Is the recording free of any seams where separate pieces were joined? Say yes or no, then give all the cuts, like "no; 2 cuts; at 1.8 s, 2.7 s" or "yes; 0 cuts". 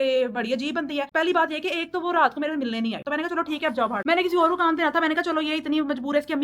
yes; 0 cuts